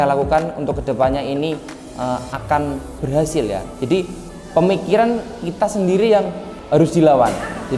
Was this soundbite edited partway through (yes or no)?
yes